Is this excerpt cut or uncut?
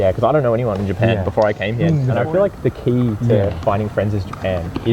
cut